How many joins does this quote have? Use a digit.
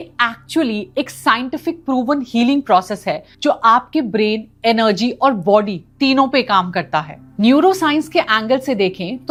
0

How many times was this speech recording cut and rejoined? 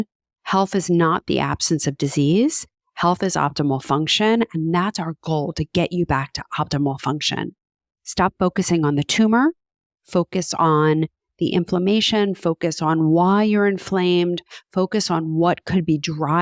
0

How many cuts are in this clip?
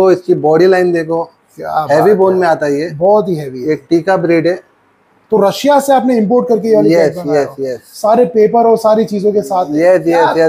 0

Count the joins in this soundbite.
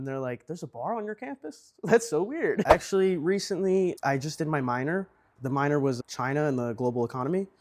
1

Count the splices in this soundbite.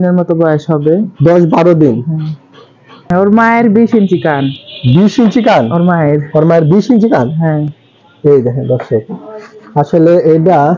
1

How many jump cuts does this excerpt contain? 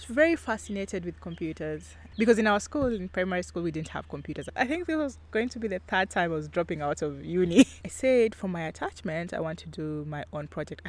3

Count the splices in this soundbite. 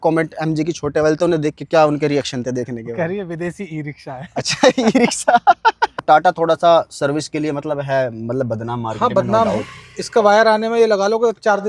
1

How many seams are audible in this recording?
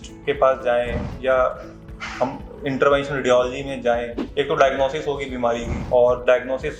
2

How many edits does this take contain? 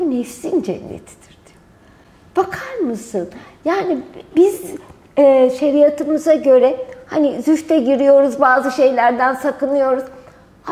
0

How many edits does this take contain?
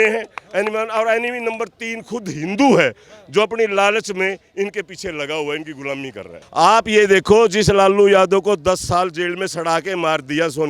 1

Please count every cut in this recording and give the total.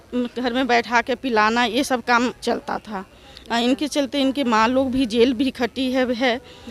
0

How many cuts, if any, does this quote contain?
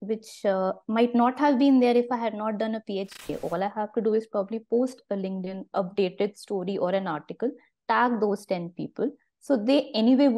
1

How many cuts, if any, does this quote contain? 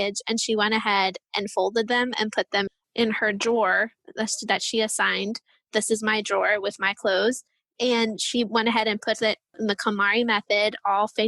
1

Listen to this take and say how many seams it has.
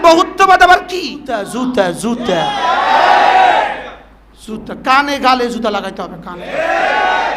1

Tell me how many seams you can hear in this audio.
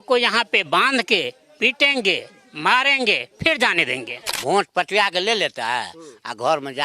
1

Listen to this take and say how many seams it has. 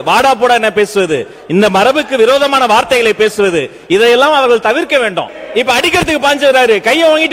1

